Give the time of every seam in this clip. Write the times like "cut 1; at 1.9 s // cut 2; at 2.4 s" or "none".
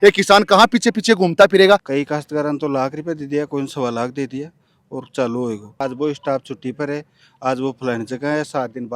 cut 1; at 1.9 s // cut 2; at 5.8 s